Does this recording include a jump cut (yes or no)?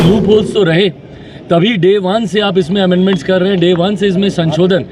no